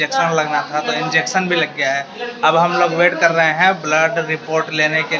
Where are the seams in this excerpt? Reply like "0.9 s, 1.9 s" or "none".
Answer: none